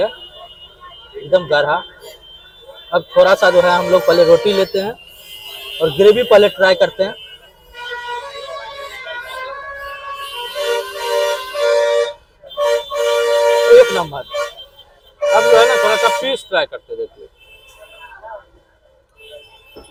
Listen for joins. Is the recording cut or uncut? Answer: uncut